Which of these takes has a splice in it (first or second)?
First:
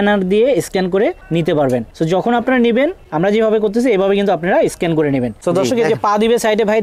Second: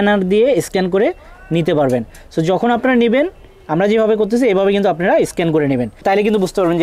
first